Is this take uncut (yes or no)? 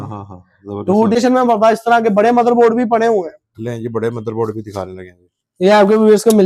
no